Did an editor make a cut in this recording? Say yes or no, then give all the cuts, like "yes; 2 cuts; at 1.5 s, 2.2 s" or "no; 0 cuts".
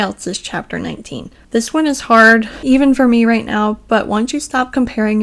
no; 0 cuts